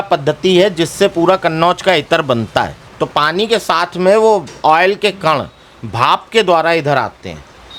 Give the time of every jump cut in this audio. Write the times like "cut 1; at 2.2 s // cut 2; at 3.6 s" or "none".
cut 1; at 2.8 s